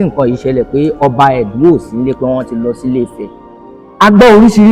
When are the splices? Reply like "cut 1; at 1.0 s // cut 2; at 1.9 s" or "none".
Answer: none